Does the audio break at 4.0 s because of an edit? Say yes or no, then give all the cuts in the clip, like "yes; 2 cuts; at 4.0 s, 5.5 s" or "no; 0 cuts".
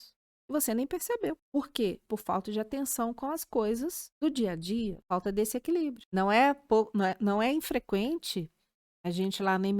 yes; 4 cuts; at 2.0 s, 4.0 s, 5.0 s, 6.0 s